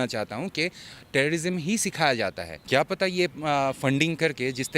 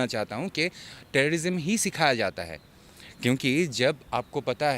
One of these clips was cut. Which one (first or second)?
first